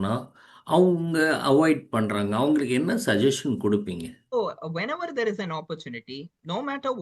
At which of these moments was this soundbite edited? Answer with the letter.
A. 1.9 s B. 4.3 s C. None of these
B